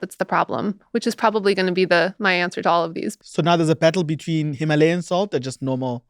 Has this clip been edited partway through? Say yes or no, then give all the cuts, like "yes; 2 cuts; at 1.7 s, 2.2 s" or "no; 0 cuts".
yes; 1 cut; at 3.0 s